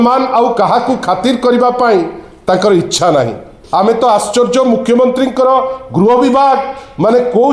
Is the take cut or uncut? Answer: cut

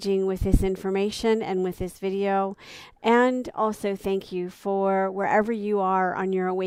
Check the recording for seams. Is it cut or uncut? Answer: uncut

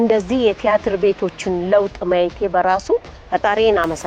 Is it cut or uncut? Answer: cut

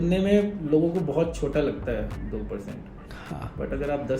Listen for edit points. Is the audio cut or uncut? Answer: uncut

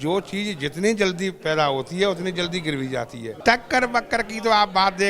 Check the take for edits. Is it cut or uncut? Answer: cut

